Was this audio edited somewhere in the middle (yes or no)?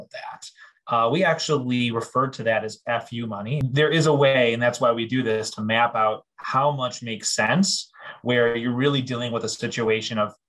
yes